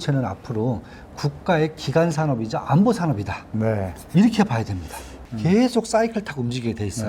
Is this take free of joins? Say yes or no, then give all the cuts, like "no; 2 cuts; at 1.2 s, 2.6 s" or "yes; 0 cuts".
no; 1 cut; at 5.3 s